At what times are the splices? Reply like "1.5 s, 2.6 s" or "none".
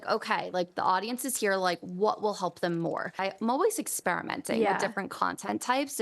3.2 s